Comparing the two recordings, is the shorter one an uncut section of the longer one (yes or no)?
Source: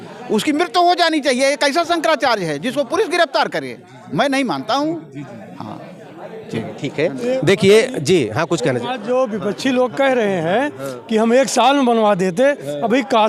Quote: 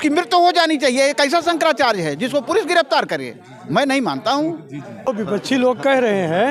no